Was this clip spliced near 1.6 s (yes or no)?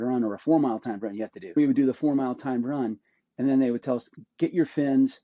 yes